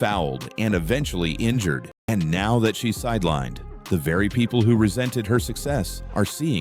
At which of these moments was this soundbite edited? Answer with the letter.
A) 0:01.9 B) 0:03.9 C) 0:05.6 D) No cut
A